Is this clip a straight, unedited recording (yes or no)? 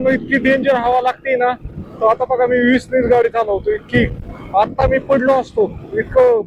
yes